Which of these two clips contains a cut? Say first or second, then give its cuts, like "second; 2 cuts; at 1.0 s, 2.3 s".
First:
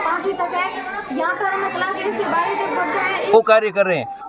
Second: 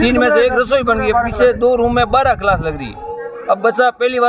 first; 1 cut; at 3.3 s